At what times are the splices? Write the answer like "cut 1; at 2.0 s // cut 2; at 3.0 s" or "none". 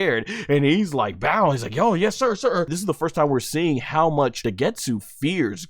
cut 1; at 2.7 s // cut 2; at 4.4 s